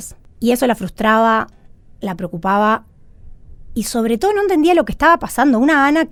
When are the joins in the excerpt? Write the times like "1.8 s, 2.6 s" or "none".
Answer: none